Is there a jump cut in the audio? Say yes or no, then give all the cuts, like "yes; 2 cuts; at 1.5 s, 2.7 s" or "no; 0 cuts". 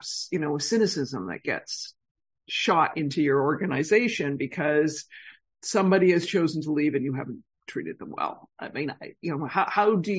no; 0 cuts